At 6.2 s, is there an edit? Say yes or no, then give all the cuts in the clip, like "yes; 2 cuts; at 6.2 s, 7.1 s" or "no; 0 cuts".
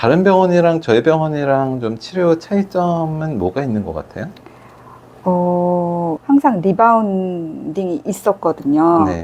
yes; 1 cut; at 6.2 s